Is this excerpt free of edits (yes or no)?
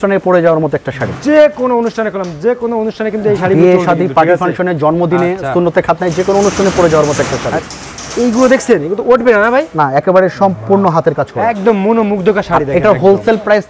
yes